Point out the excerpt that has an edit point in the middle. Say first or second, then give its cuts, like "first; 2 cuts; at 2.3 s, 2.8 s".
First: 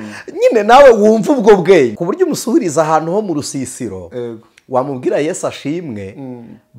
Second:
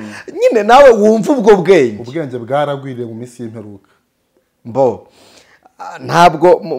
first; 1 cut; at 2.0 s